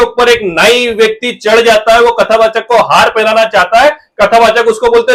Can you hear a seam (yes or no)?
no